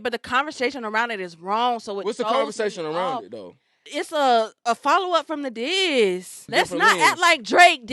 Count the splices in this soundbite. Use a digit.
2